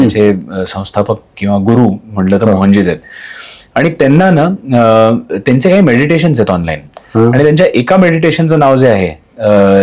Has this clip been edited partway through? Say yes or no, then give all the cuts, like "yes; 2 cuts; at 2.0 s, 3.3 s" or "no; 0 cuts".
no; 0 cuts